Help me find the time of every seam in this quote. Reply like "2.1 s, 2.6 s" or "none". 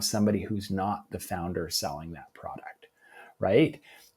none